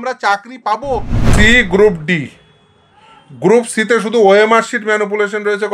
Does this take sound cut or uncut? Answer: cut